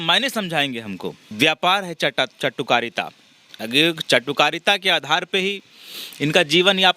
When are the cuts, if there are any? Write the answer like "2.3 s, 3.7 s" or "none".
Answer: 1.2 s